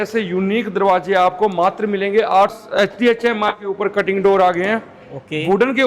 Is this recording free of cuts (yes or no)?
no